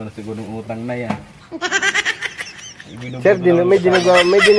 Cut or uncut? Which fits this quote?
uncut